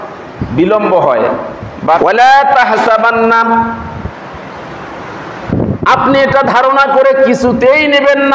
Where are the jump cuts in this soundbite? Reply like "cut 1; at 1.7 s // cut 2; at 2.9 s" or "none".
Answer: cut 1; at 2.0 s